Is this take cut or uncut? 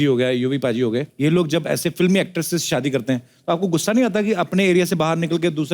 cut